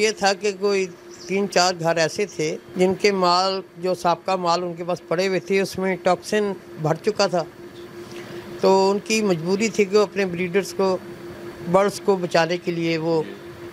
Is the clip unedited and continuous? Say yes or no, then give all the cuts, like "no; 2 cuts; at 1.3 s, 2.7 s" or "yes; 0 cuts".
no; 1 cut; at 2.6 s